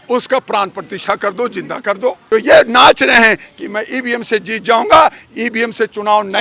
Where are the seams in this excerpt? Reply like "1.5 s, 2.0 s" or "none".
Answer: 2.2 s